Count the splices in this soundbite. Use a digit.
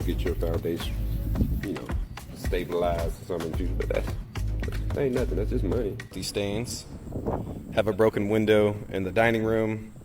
1